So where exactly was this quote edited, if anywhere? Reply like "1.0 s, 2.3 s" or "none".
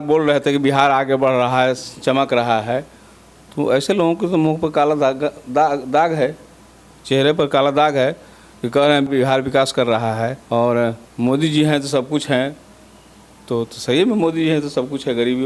9.1 s, 10.4 s, 11.1 s